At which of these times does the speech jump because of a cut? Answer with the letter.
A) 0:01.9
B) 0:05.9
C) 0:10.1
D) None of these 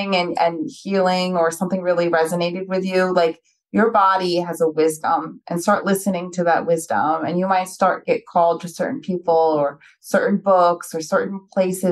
D